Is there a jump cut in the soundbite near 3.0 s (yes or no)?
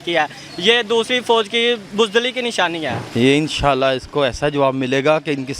yes